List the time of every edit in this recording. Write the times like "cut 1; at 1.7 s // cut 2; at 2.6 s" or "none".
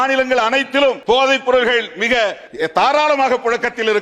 cut 1; at 1.0 s // cut 2; at 2.4 s